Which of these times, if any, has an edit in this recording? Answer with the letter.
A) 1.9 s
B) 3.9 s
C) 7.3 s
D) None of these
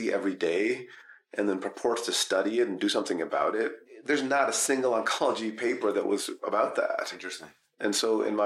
B